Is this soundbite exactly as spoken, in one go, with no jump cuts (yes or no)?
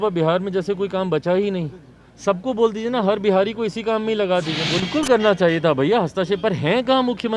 no